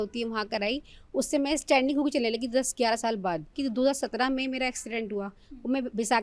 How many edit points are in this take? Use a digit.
1